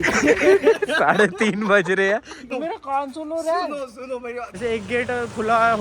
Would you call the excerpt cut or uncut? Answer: cut